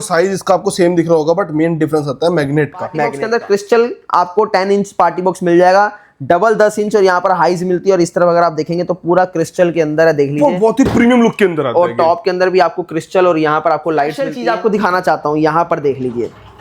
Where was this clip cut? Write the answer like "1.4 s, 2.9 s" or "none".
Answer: 3.2 s, 14.3 s